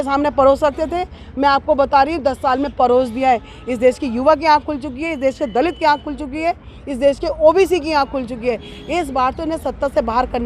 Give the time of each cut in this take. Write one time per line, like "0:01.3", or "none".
none